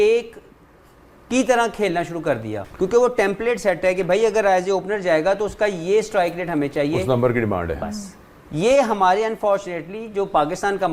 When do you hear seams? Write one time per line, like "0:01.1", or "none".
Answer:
0:02.6